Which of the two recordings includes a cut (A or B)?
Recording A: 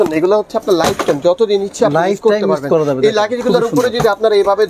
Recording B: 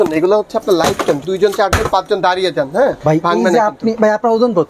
B